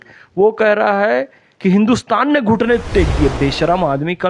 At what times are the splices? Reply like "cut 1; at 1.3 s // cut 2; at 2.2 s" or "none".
none